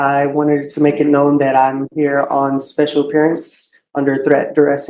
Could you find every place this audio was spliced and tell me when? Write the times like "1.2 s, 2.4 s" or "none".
none